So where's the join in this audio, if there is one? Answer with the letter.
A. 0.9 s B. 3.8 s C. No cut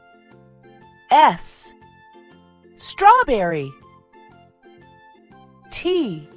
A